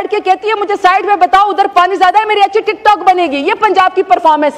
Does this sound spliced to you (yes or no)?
no